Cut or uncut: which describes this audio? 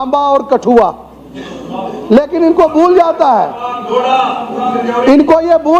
uncut